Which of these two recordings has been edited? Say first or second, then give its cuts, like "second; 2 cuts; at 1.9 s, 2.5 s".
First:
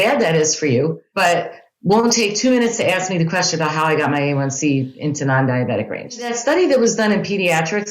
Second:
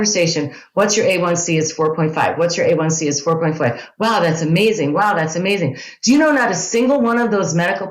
first; 2 cuts; at 1.0 s, 6.3 s